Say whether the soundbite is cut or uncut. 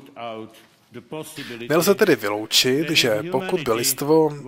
cut